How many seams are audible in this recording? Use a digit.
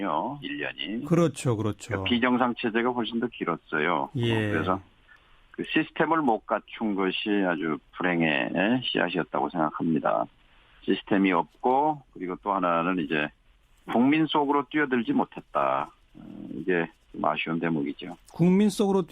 1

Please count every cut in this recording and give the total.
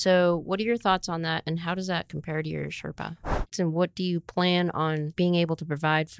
2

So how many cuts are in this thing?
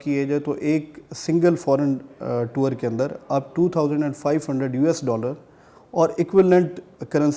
0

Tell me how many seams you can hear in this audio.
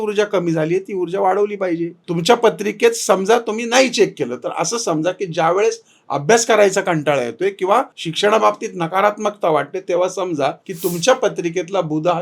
3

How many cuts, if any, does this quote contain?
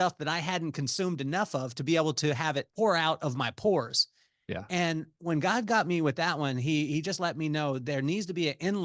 1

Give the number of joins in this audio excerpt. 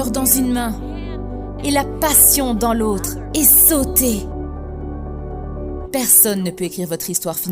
1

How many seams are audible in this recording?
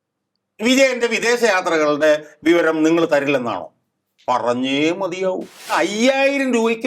1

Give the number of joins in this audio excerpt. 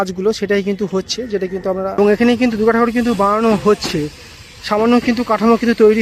1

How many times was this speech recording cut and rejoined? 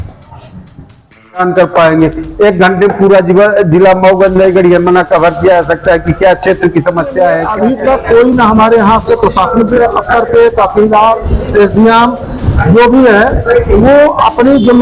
2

